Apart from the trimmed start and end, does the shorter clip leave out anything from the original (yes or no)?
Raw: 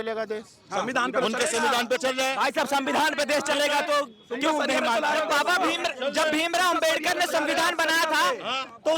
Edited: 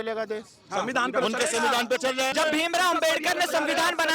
yes